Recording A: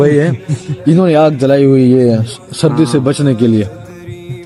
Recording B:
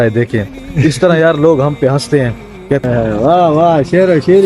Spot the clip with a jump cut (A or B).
B